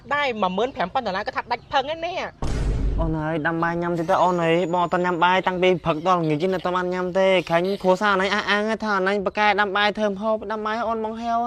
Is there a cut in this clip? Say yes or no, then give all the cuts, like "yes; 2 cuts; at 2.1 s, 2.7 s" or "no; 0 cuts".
no; 0 cuts